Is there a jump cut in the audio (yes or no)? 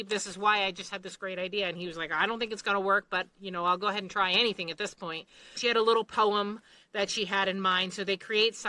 yes